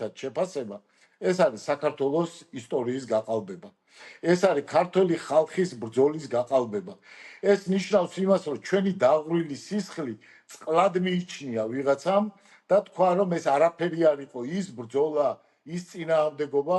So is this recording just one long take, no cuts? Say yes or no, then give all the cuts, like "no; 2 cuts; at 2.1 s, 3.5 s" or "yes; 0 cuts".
yes; 0 cuts